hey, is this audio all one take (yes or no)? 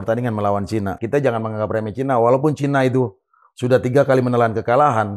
no